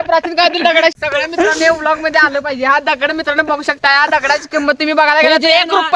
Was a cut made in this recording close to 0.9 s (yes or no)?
yes